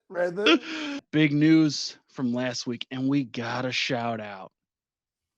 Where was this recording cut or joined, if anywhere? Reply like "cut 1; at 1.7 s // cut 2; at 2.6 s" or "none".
cut 1; at 1.0 s